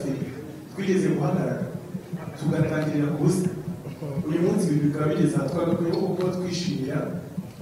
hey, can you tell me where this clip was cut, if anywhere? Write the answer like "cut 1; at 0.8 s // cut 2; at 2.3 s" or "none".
none